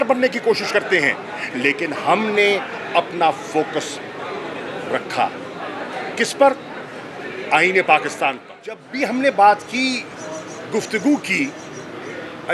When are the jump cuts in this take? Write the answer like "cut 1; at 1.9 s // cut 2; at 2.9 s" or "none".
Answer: cut 1; at 8.9 s